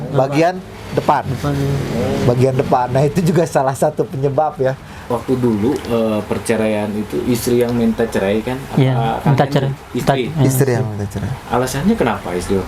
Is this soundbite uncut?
no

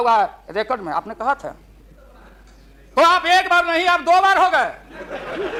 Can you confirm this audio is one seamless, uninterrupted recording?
yes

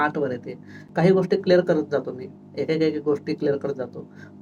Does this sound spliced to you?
no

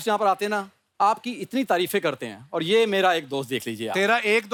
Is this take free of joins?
yes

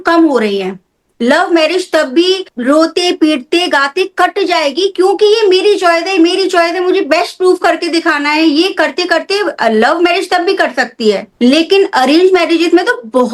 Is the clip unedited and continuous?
yes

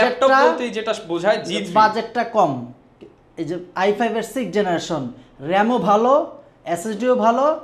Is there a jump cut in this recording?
no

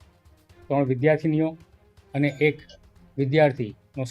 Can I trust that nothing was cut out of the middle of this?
yes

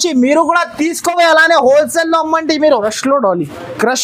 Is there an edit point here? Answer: yes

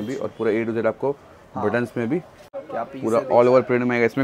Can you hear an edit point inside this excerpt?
yes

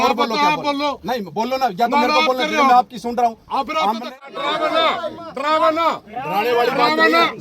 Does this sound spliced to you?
yes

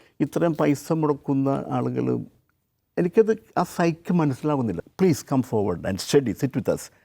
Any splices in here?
yes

